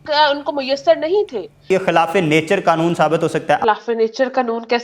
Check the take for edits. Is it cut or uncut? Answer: cut